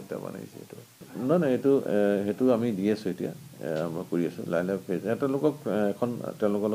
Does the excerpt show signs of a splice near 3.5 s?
no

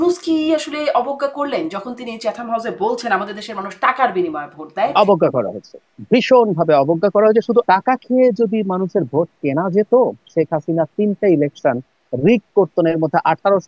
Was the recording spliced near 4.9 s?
yes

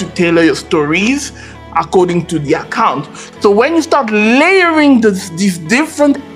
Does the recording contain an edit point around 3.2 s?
yes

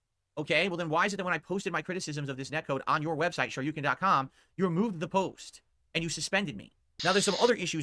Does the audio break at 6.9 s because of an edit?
yes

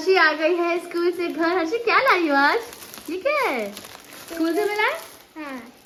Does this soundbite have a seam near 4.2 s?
no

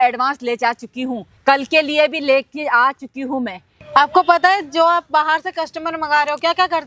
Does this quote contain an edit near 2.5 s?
no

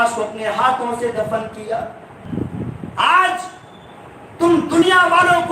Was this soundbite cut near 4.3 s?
no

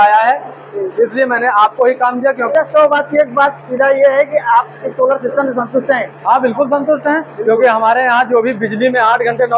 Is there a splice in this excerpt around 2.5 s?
yes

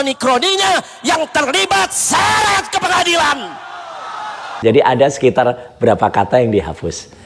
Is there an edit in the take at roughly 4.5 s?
yes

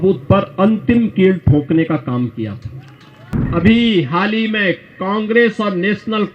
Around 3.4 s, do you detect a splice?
yes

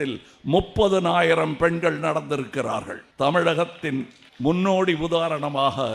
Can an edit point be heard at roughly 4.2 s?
yes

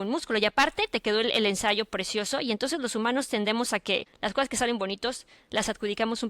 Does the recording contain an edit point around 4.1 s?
yes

